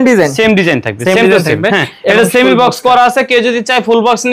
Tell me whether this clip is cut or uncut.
uncut